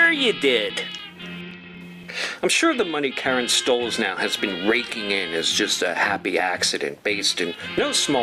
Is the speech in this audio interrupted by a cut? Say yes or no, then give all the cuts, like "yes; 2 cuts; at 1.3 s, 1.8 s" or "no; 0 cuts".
yes; 1 cut; at 1.1 s